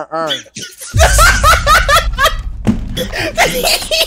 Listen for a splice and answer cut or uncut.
cut